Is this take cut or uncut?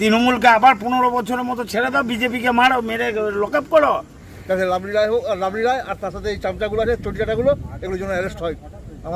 cut